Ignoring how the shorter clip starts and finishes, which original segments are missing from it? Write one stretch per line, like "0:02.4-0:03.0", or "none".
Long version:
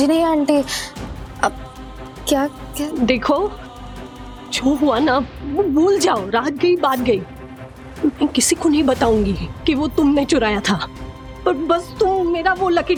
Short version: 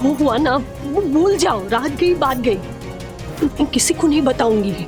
none